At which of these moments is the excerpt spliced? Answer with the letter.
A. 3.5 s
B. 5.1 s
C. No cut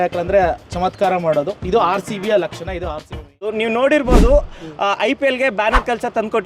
A